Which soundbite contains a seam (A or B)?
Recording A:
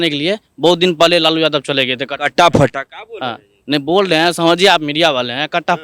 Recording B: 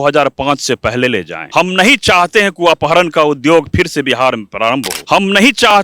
B